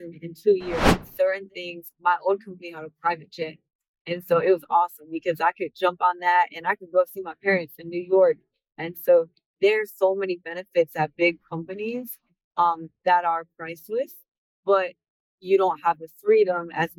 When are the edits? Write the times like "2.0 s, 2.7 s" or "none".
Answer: 1.0 s